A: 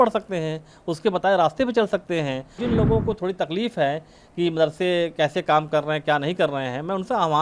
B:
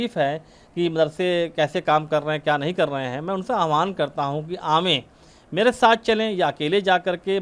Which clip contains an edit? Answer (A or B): A